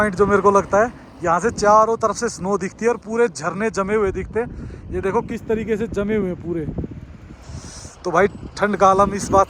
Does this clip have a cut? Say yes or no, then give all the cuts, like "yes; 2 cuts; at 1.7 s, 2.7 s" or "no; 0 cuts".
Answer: no; 0 cuts